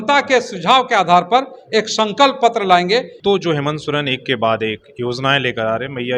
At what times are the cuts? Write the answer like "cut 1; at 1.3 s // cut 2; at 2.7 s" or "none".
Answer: cut 1; at 3.1 s